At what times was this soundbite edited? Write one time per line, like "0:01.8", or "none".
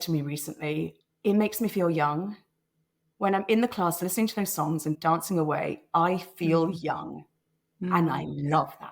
0:01.0
0:05.0